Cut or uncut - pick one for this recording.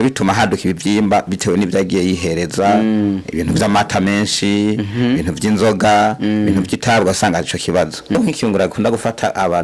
cut